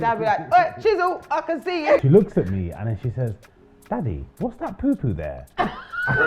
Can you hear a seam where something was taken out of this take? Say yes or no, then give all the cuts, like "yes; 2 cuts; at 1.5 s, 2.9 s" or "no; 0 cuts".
yes; 1 cut; at 2.0 s